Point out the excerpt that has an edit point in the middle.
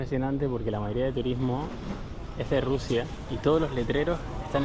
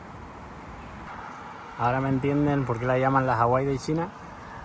second; 1 cut; at 1.1 s

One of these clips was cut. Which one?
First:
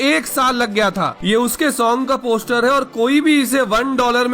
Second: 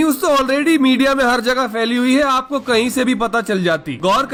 first; 1 cut; at 1.1 s

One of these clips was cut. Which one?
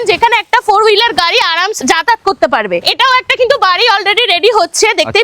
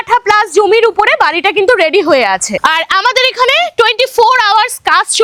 first; 1 cut; at 1.8 s

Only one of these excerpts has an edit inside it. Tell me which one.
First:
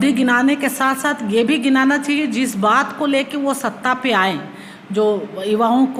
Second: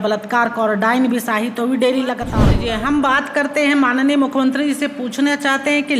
second; 1 cut; at 2.6 s

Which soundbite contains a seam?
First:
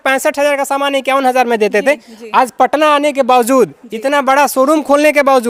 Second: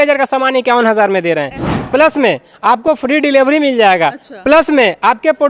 second; 1 cut; at 1.7 s

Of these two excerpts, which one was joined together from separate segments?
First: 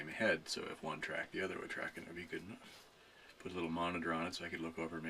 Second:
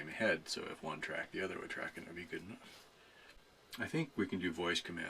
second; 1 cut; at 3.4 s

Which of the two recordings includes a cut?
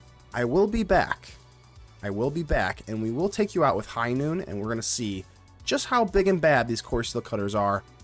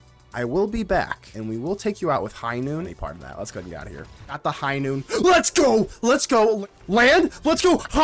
second; 4 cuts; at 1.3 s, 2.9 s, 4.4 s, 6.6 s

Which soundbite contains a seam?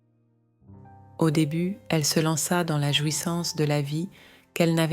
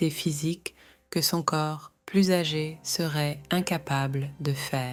first; 1 cut; at 1.2 s

